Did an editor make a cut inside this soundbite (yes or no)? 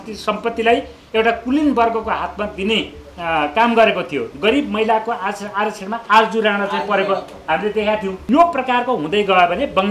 yes